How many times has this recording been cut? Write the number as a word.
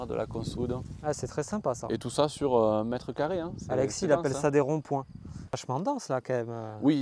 one